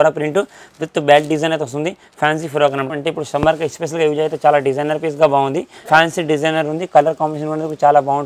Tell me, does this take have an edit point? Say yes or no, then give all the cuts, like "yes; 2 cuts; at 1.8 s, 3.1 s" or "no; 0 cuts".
yes; 2 cuts; at 2.9 s, 5.7 s